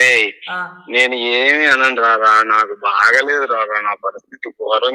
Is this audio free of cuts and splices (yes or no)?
yes